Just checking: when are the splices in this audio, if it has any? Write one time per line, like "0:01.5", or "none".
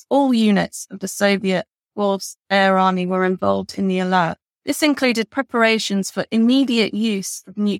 0:04.5

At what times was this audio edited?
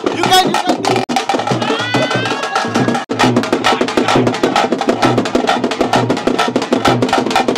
0:01.1
0:03.1

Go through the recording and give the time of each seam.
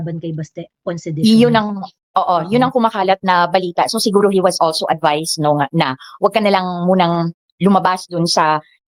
none

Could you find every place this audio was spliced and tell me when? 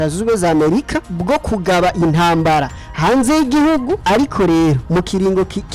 0:01.1
0:04.0
0:04.8

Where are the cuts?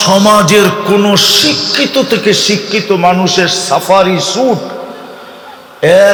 none

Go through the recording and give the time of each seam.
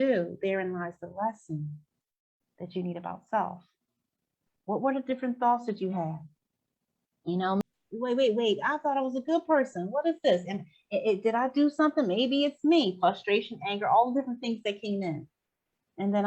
0:07.6

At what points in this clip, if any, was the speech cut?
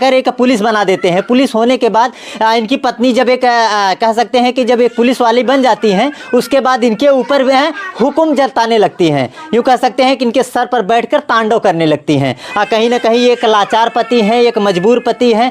none

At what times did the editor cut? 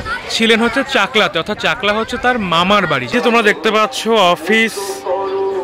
0:03.1

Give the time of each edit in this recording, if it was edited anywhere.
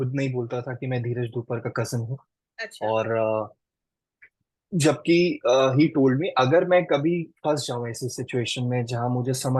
none

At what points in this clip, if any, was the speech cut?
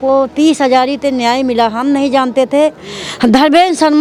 none

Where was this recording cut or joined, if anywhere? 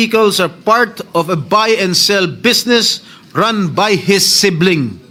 none

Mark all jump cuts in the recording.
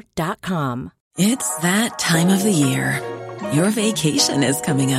0:01.0

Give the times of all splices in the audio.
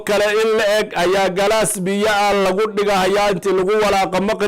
none

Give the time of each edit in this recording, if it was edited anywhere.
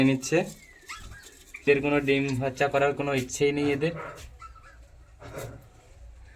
0:01.6

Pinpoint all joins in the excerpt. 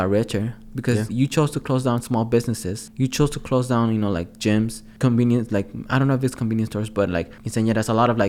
0:02.8
0:04.8
0:07.4

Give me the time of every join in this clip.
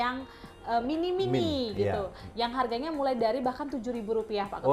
none

